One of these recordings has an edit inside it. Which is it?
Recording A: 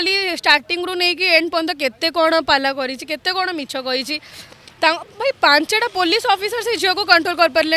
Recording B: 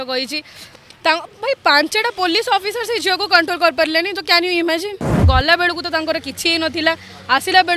B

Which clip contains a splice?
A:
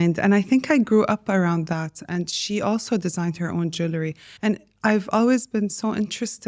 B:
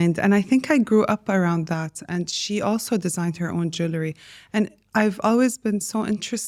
A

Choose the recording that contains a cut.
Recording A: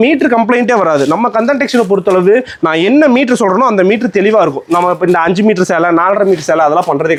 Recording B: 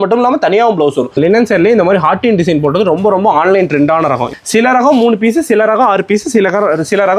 B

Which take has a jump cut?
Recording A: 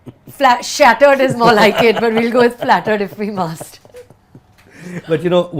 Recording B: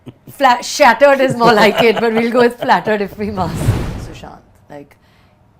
B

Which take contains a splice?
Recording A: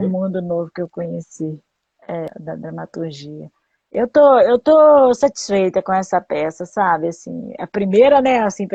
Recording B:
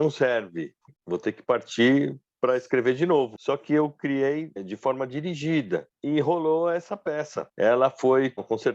B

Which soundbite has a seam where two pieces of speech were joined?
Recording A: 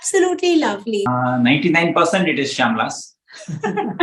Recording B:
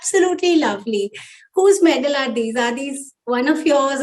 A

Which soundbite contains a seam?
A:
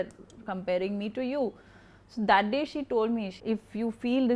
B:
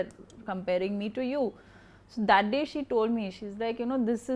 A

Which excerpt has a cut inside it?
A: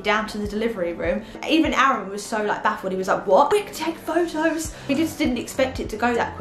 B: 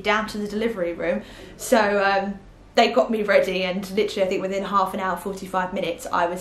A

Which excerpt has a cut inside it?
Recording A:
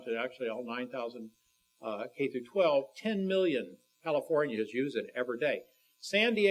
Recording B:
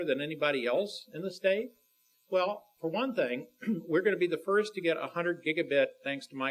A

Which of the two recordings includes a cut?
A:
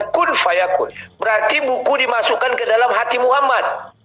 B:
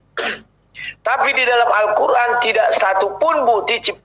A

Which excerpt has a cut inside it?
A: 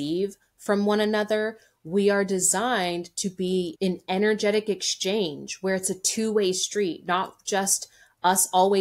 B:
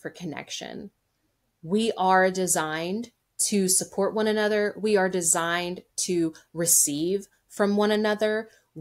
A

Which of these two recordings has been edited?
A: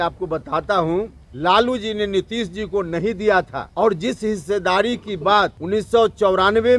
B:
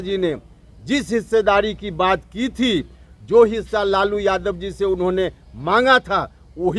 A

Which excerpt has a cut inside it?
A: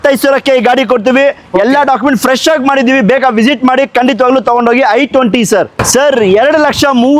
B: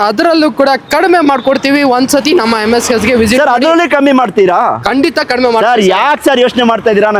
A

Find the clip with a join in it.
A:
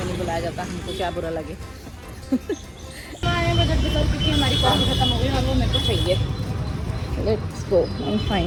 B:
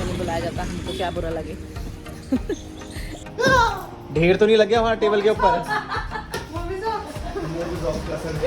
B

